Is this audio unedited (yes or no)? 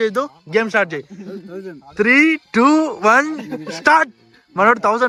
yes